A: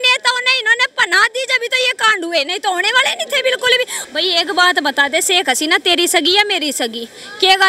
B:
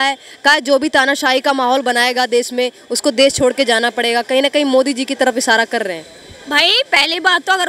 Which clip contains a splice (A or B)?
A